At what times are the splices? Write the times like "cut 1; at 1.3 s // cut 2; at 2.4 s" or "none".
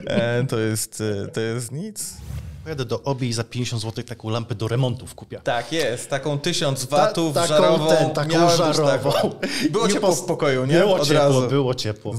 cut 1; at 2.3 s